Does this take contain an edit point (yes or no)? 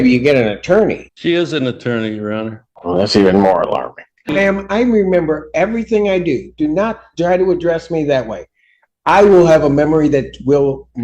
yes